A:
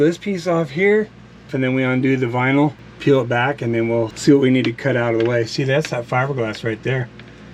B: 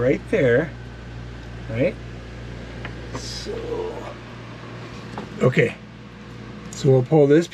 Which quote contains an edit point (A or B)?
A